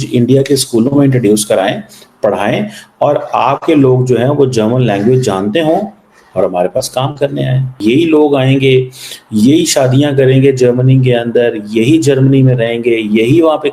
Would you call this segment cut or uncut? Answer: cut